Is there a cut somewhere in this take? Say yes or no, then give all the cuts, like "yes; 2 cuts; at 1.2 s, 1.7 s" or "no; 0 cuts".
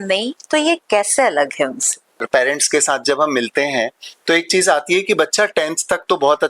yes; 1 cut; at 2.2 s